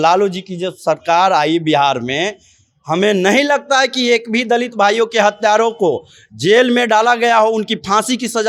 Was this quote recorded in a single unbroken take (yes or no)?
yes